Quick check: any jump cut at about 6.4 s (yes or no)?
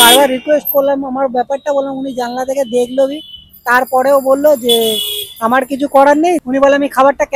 yes